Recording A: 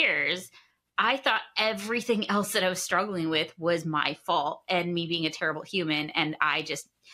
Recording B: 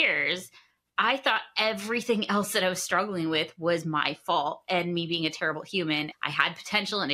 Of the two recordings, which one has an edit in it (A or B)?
B